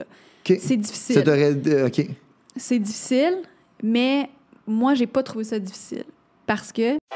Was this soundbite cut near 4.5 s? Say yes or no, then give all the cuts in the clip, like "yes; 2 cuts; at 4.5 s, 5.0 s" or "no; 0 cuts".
no; 0 cuts